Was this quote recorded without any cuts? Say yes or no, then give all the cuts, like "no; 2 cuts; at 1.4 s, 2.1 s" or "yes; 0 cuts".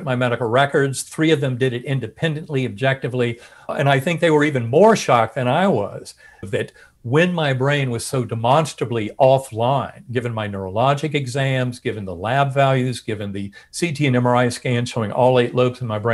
no; 2 cuts; at 3.7 s, 6.5 s